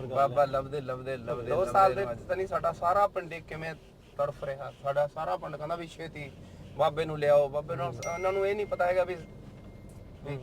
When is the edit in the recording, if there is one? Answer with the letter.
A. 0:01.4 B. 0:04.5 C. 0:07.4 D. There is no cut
A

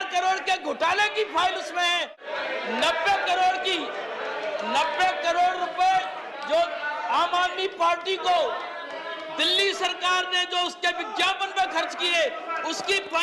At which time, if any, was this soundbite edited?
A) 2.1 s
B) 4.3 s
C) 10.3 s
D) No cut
A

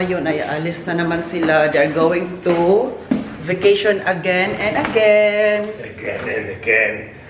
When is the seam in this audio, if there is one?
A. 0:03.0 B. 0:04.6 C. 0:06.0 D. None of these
D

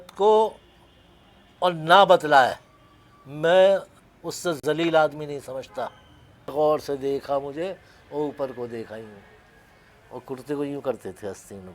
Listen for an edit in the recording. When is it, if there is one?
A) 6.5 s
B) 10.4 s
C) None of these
A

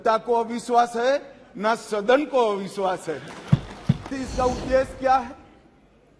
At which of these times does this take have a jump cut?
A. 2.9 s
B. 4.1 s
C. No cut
B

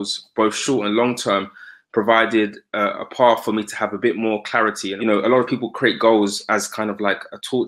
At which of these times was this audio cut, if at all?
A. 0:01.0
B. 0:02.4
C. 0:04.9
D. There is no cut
C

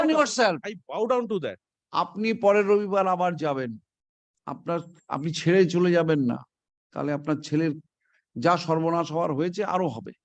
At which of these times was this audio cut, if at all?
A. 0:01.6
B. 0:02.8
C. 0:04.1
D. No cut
D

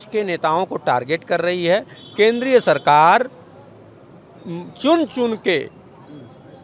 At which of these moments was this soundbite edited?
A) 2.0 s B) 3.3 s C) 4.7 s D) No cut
D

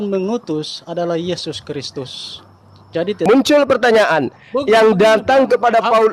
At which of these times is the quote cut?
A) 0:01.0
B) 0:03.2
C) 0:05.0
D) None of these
B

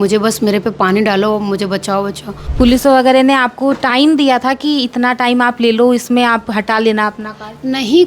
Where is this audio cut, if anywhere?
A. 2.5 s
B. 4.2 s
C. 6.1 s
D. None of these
A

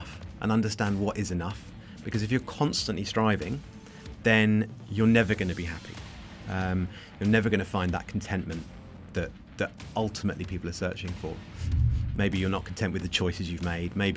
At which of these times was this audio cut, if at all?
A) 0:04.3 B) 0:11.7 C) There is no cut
B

